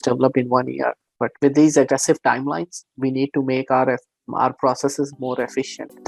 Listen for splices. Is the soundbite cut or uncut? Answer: uncut